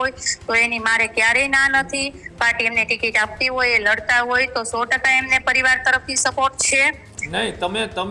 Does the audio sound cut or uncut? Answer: uncut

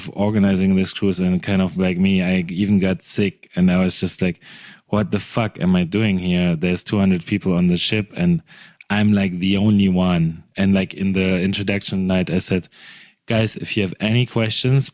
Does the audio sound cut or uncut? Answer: uncut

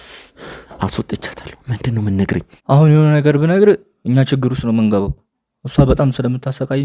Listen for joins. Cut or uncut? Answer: cut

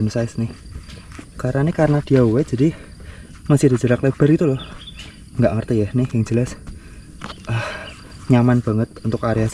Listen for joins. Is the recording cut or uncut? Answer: uncut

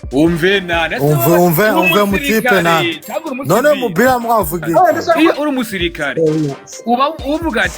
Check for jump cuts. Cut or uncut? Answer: cut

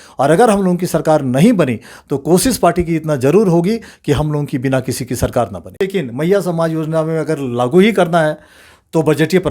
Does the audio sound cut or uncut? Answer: cut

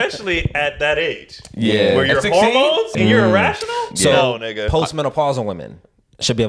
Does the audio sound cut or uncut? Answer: cut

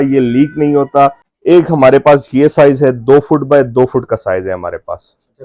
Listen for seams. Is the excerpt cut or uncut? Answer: cut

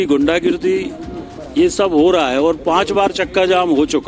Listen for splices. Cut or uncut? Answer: uncut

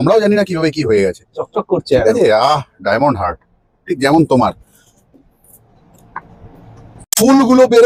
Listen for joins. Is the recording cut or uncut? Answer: uncut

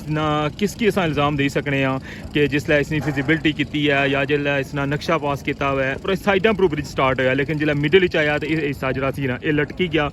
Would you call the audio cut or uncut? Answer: cut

